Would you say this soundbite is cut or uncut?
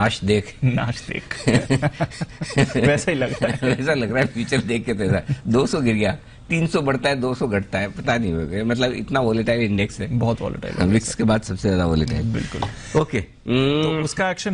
uncut